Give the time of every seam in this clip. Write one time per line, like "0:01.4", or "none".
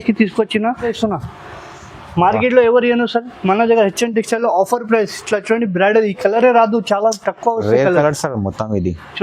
0:00.9